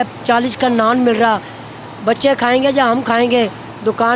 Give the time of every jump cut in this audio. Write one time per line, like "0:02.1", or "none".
none

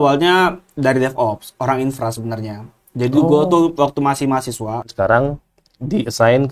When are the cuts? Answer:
0:04.8

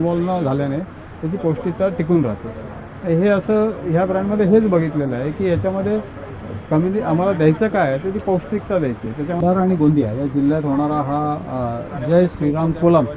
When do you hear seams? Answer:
0:09.4

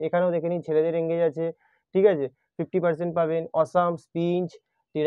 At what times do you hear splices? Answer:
none

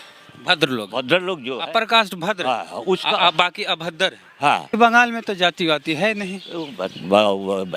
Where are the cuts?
0:04.7

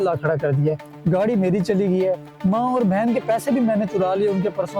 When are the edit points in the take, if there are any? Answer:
none

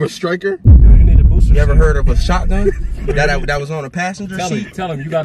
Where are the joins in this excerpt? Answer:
none

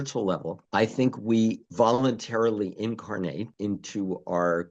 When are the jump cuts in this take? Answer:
none

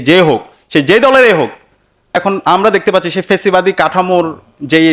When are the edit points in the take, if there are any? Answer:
0:02.1

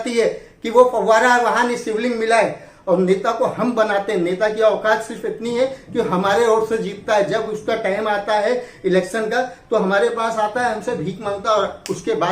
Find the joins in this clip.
0:02.7

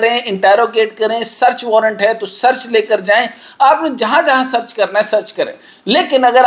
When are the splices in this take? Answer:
none

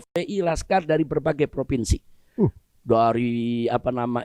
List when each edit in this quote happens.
none

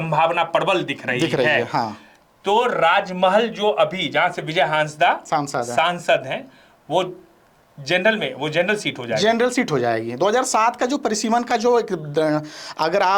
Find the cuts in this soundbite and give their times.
none

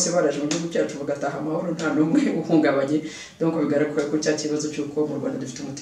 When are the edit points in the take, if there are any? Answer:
none

